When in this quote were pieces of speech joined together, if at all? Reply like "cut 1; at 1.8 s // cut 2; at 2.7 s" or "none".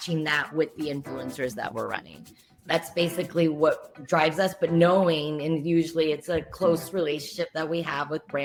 none